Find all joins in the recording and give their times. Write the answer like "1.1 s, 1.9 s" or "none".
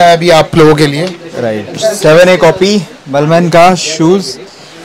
none